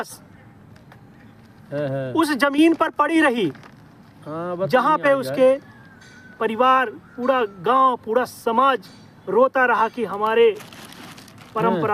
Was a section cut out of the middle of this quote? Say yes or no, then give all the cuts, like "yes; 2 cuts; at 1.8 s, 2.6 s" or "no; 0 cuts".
no; 0 cuts